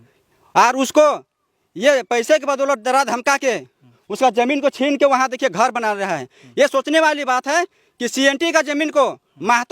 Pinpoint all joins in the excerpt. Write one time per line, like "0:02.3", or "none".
none